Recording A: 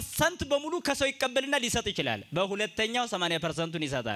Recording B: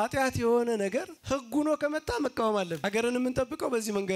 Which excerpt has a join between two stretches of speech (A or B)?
B